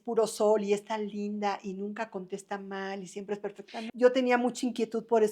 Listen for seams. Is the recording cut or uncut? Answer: cut